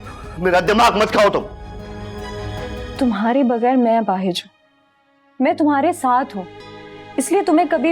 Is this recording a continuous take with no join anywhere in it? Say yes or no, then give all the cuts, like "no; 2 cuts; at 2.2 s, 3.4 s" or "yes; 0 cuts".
no; 1 cut; at 2.9 s